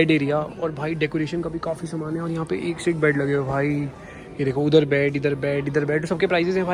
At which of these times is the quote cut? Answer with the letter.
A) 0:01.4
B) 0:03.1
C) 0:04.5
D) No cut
D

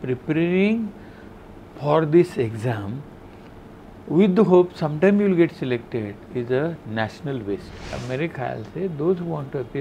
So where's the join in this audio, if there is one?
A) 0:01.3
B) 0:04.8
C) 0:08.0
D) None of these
C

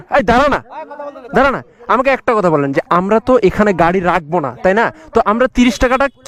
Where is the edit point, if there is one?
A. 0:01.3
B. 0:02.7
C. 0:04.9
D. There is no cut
D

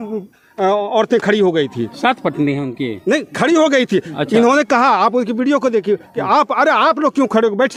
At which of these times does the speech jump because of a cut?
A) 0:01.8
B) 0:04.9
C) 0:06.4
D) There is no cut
D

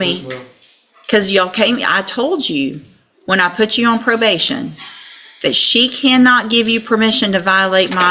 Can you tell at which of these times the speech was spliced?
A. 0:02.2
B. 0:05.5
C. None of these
C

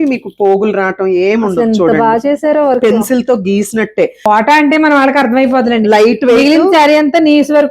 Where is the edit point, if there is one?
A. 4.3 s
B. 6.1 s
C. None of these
A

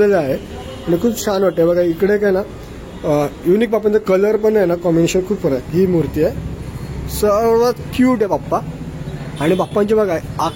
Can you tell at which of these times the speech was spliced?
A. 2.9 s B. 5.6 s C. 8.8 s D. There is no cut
B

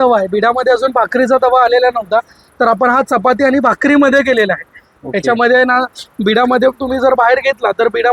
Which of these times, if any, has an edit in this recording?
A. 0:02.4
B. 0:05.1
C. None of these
C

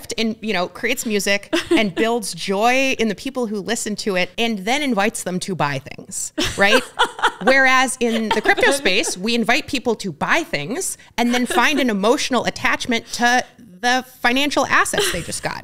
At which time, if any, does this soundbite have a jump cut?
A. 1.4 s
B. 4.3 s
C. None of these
B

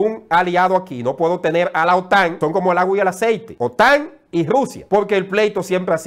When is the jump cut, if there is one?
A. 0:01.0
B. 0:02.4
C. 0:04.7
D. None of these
B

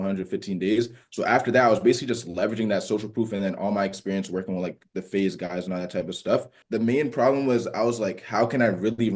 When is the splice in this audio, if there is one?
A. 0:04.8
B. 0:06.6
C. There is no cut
B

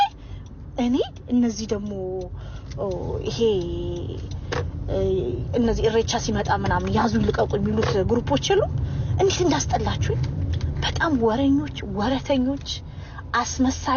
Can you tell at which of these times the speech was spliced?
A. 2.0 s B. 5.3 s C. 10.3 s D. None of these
D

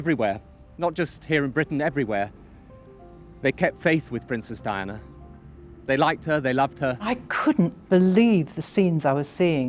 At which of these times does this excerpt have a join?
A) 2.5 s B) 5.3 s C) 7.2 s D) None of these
C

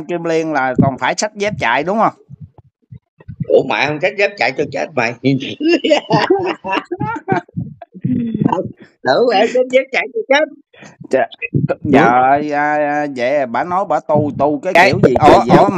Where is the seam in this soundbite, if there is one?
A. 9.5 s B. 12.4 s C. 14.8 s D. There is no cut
C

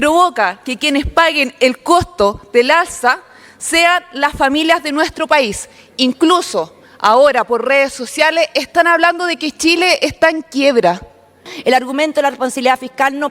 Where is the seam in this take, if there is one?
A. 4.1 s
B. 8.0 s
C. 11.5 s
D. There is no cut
C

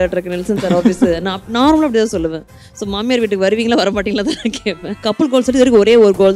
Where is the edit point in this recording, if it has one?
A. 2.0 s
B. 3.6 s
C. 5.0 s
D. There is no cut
C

